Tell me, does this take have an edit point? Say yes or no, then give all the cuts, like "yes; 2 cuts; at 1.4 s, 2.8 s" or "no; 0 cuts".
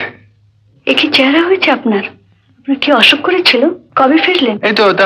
yes; 1 cut; at 3.8 s